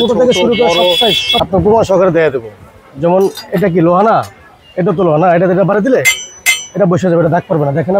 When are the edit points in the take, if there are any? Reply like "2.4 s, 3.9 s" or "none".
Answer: 1.4 s